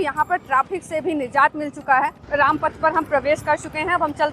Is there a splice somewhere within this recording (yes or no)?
yes